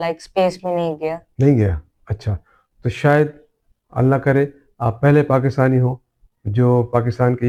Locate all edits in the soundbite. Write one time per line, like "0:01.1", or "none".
none